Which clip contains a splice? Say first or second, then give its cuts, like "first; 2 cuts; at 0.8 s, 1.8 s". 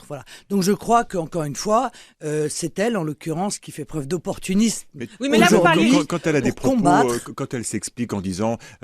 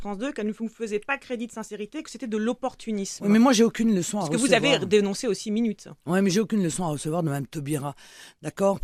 first; 1 cut; at 2.9 s